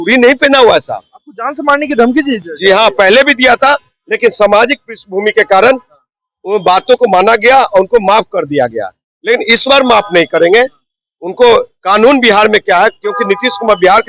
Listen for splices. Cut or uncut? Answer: uncut